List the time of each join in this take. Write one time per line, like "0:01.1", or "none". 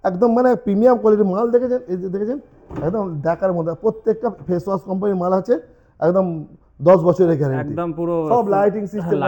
none

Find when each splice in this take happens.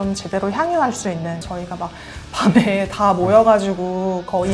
0:01.5

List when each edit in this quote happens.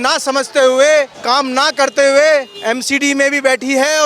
0:01.2
0:02.5

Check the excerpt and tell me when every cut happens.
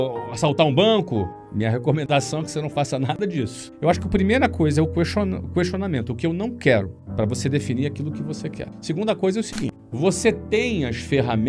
0:03.8

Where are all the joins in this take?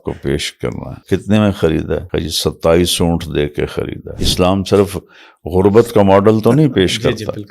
0:00.9
0:02.1
0:04.2

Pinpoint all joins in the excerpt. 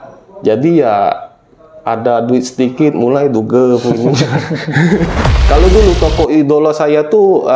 0:05.2

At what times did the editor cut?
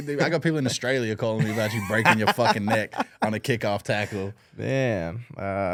none

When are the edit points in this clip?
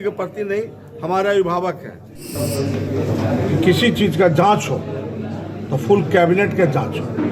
0:02.3

